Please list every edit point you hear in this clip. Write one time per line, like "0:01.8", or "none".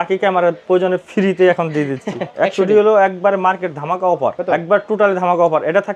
0:02.3
0:04.4